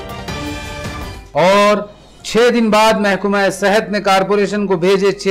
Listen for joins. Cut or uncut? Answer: uncut